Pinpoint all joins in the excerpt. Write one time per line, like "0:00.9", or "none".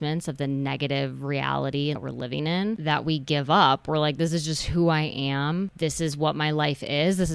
0:02.0